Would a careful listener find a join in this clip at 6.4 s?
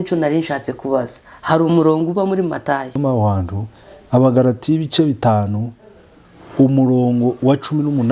no; 1 cut; at 2.9 s

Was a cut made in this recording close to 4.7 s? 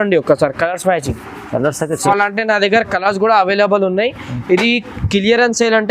no; 1 cut; at 2.1 s

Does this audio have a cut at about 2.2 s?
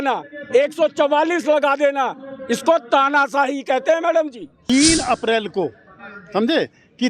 no; 1 cut; at 4.5 s

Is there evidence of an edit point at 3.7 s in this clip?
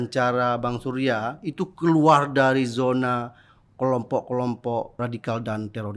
no; 1 cut; at 5.0 s

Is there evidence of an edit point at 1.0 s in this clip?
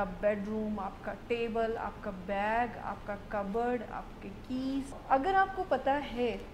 no; 1 cut; at 5.0 s

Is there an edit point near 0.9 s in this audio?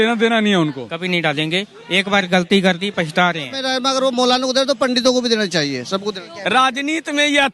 yes; 3 cuts; at 0.9 s, 3.6 s, 6.3 s

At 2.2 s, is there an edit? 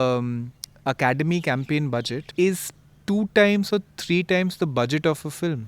yes; 1 cut; at 2.2 s

